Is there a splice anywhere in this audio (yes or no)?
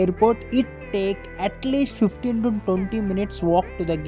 no